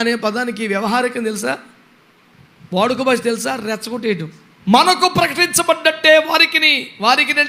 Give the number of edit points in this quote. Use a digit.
1